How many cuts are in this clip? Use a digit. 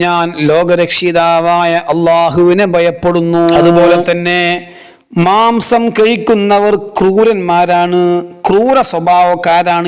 1